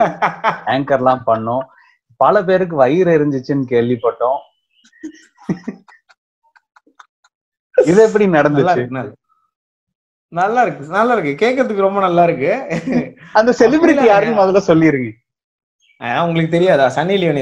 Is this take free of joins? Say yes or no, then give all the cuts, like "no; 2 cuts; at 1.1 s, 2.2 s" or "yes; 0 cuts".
yes; 0 cuts